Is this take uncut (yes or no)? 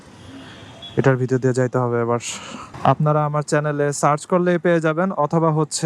no